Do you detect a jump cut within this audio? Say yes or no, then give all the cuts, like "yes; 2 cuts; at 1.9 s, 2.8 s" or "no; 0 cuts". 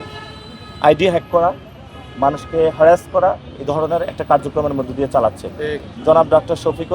yes; 1 cut; at 5.8 s